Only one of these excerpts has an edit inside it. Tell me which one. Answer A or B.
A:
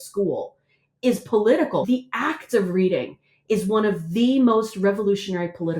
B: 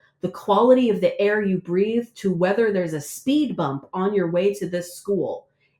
A